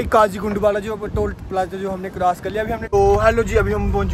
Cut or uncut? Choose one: cut